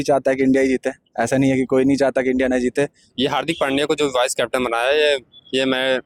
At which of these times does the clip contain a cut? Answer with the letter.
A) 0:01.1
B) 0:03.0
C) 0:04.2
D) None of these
B